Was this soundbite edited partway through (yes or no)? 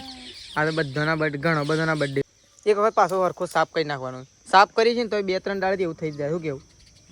yes